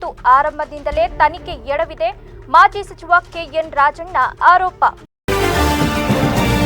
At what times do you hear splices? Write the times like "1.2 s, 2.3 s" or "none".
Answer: 5.1 s